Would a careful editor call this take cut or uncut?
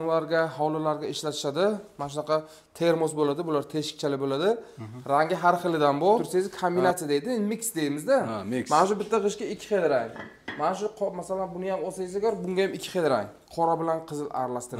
cut